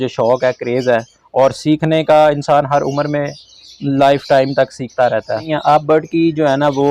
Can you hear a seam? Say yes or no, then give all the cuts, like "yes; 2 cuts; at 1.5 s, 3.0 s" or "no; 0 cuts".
yes; 1 cut; at 5.5 s